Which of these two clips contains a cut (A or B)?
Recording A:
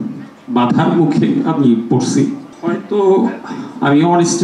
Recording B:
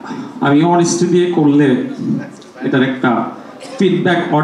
A